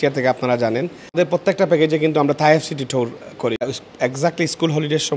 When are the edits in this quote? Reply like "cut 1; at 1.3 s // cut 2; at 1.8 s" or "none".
cut 1; at 1.2 s // cut 2; at 3.6 s